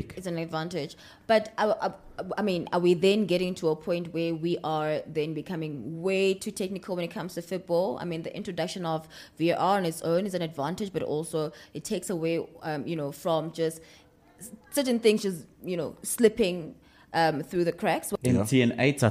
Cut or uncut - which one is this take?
cut